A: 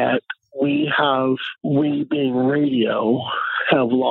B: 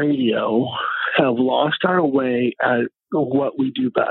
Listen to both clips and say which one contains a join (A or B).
A